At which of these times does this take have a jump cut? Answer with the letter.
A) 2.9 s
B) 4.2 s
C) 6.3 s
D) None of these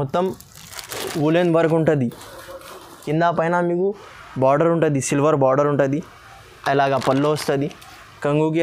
A